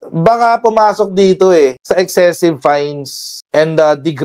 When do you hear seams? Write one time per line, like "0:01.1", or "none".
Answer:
none